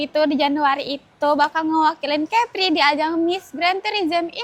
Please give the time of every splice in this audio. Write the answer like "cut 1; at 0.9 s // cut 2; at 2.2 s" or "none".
none